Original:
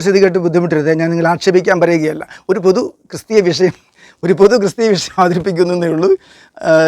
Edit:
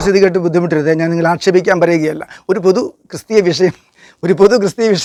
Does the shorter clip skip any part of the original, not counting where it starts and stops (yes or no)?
no